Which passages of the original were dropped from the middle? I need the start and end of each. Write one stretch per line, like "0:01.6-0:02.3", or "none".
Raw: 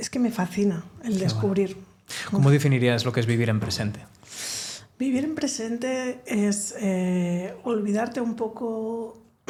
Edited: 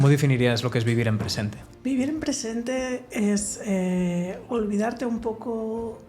0:04.1-0:04.8